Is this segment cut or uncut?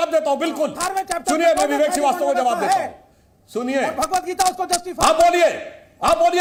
uncut